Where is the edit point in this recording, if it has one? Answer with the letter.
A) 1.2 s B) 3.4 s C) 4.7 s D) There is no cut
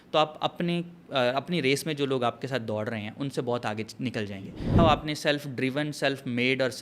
C